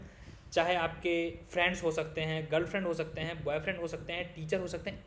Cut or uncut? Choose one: uncut